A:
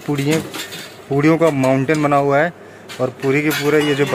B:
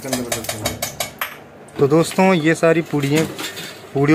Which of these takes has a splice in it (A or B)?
B